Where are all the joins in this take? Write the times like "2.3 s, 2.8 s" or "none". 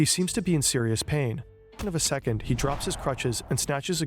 1.7 s